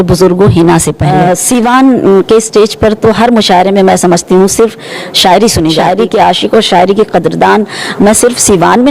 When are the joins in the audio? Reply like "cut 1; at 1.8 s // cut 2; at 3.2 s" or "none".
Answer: cut 1; at 1.0 s // cut 2; at 5.8 s